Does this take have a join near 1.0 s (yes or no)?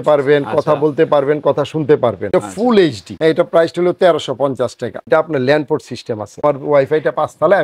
no